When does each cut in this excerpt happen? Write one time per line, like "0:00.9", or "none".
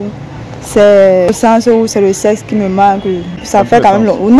0:01.4
0:03.4